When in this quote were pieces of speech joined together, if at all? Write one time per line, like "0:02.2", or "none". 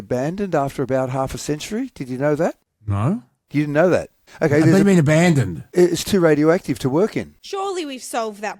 none